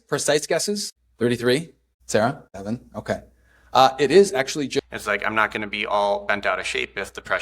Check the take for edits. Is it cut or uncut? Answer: cut